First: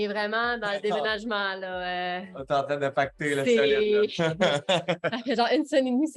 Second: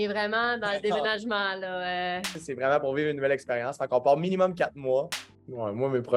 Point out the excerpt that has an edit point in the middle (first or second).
second